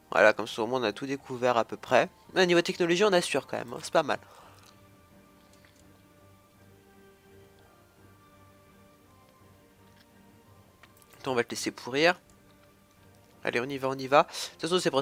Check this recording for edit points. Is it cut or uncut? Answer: uncut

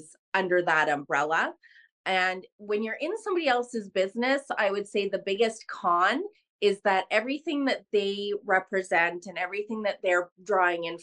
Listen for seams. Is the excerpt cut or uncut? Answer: uncut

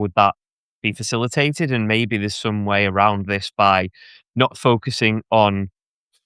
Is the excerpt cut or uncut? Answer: uncut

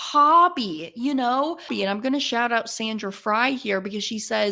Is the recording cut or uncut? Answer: cut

